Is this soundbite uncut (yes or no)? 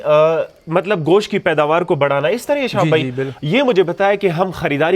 yes